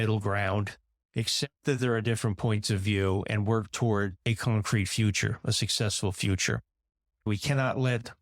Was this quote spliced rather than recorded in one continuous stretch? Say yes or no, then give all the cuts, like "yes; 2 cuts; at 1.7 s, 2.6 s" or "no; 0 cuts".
yes; 1 cut; at 7.2 s